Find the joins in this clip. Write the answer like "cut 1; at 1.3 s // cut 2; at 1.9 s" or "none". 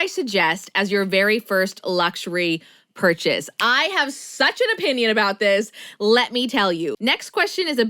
cut 1; at 6.9 s